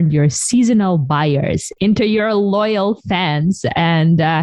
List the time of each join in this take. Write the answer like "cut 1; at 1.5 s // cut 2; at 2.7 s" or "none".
cut 1; at 1.8 s